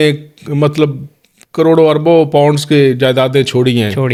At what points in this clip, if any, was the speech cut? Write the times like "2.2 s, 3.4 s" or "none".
none